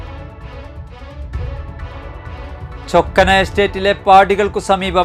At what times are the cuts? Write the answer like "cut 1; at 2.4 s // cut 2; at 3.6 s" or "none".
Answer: cut 1; at 2.0 s // cut 2; at 2.9 s